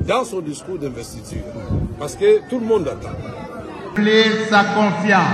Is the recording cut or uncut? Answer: cut